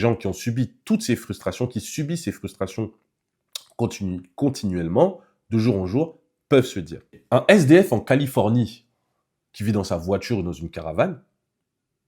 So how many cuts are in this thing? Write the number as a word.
one